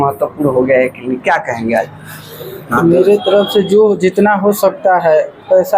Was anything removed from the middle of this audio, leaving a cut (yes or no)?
yes